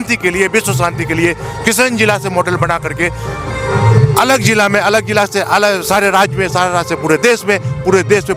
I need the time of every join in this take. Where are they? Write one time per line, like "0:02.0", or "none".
none